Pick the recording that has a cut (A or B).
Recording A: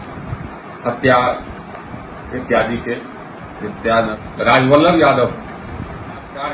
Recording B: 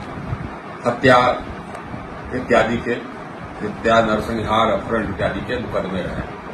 A